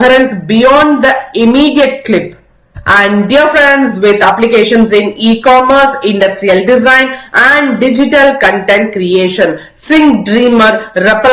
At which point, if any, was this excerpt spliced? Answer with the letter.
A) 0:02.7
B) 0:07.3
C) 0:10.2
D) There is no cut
A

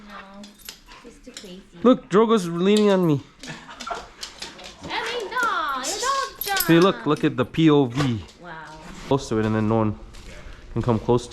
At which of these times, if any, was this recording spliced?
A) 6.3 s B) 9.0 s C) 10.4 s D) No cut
B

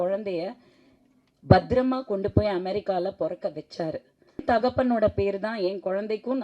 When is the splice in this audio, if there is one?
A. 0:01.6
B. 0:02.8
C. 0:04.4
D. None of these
C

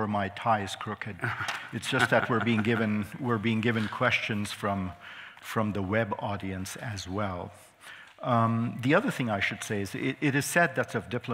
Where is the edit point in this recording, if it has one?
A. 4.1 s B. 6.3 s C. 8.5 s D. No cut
C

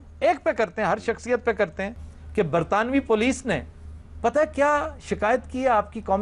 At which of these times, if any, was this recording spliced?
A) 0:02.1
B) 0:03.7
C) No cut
A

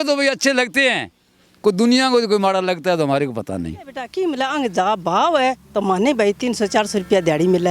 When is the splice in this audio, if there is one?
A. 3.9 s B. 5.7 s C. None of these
A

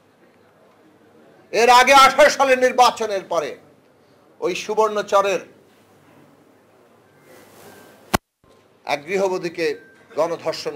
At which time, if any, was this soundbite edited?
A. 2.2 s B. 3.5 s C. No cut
C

